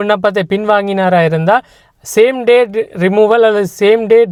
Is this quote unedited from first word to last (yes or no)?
yes